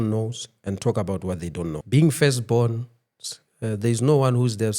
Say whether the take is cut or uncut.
cut